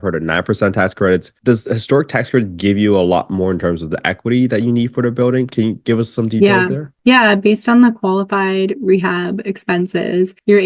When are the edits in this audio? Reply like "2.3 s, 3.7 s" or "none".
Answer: none

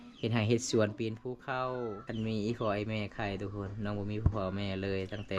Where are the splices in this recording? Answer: 2.0 s

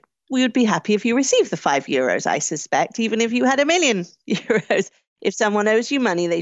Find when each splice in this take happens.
none

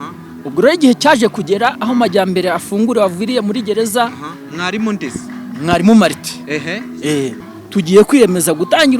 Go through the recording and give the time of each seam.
7.4 s

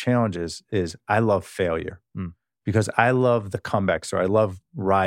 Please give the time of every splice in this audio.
none

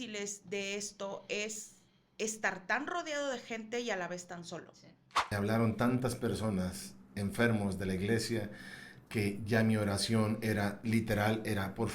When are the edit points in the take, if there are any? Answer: 5.3 s

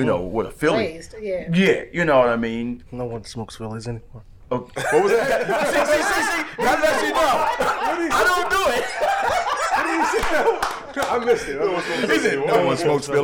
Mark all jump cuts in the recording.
none

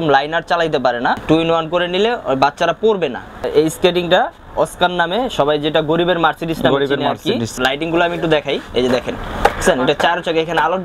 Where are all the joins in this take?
1.2 s, 3.5 s, 7.5 s

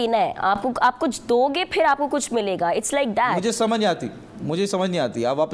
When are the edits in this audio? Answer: none

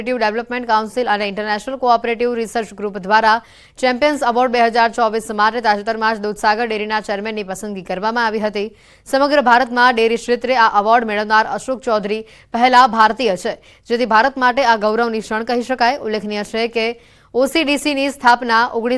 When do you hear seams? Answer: 12.1 s

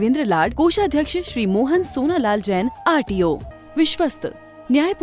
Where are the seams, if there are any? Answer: 3.5 s

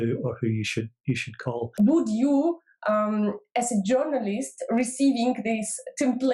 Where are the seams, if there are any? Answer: 1.7 s

